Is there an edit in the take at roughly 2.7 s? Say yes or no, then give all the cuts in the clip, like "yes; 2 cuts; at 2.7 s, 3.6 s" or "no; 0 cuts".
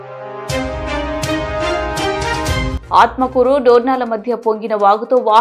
yes; 1 cut; at 2.7 s